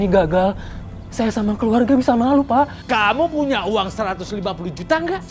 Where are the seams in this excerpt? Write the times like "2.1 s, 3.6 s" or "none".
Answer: none